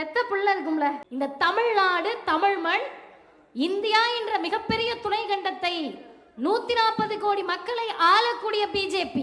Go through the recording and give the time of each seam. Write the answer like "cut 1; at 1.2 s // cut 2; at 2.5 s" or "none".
cut 1; at 1.0 s

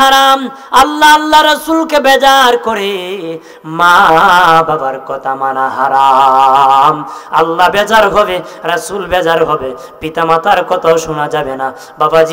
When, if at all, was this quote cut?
none

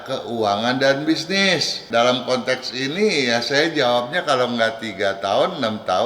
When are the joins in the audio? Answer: cut 1; at 1.8 s

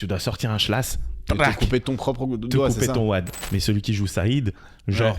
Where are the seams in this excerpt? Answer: cut 1; at 3.4 s

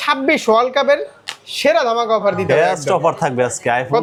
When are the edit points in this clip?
none

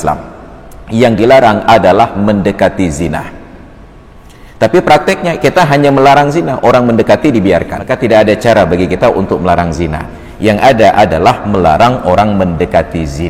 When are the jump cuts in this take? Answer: cut 1; at 7.8 s

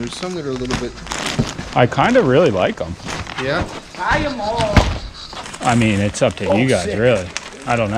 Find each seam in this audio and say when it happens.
cut 1; at 5.4 s

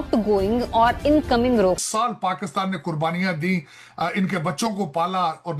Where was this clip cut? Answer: cut 1; at 1.8 s

